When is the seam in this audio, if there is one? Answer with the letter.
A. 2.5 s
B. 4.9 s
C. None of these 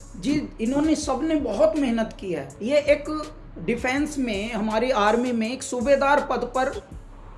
A